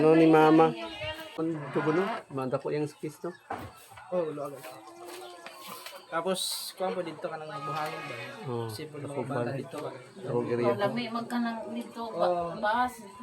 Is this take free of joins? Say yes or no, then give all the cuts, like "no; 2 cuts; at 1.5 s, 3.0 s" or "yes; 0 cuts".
no; 1 cut; at 1.4 s